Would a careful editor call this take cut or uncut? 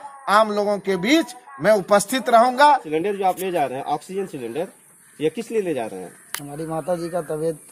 cut